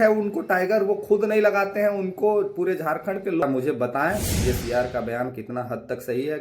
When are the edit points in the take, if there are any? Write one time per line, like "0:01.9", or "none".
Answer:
0:03.4